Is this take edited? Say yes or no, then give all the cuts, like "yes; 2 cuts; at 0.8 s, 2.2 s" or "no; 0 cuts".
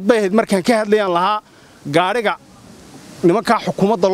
no; 0 cuts